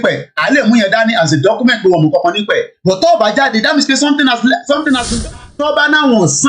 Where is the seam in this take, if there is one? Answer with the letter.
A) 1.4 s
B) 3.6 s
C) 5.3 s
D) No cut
C